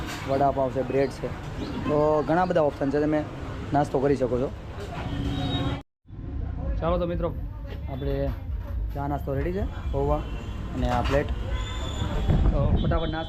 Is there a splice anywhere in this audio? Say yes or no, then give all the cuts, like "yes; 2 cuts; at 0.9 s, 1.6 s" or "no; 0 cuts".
no; 0 cuts